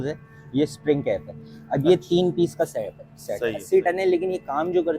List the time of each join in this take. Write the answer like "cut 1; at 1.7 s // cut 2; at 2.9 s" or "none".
cut 1; at 3.6 s